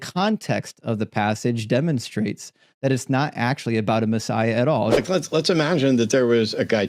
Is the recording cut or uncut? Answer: cut